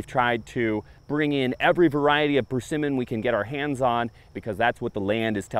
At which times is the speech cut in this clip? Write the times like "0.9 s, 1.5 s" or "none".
0.9 s, 4.3 s